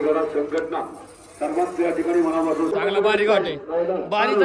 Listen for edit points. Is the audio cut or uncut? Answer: cut